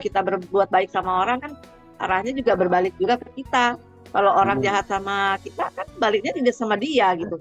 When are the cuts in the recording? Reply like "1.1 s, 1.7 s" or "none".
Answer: none